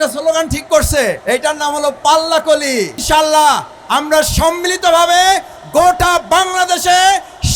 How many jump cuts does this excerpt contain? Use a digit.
2